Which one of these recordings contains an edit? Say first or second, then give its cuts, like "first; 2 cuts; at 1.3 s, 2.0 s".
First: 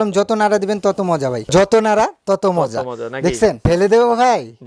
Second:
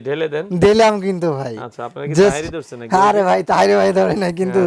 first; 2 cuts; at 1.4 s, 3.6 s